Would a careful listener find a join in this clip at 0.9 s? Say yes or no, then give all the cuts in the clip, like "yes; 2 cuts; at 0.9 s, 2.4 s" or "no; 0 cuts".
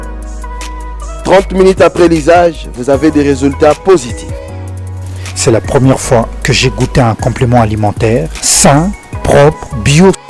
yes; 1 cut; at 0.9 s